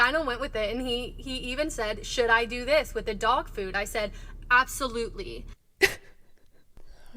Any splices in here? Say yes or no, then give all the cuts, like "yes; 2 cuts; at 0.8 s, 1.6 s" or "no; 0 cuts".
no; 0 cuts